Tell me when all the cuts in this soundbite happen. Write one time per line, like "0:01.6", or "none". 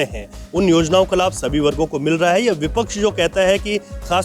none